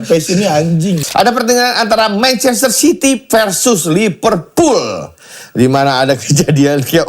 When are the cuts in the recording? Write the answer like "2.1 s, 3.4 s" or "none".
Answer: 1.0 s